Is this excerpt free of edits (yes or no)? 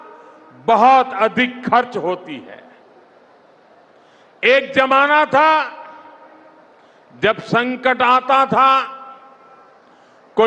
yes